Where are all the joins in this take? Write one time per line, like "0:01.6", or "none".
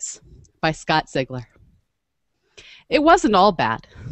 0:01.2